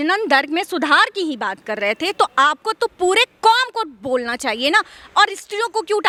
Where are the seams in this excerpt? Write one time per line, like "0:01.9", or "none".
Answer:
none